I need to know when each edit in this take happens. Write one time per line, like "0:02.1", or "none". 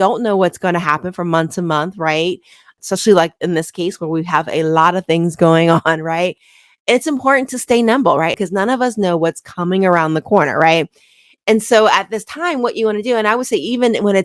none

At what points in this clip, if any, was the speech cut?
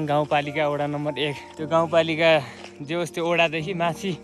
none

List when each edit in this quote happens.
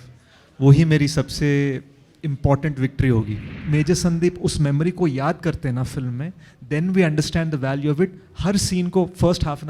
0:03.6

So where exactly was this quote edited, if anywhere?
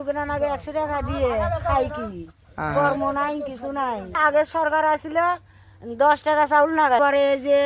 0:04.2
0:07.0

